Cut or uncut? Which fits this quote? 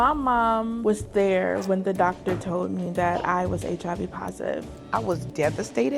cut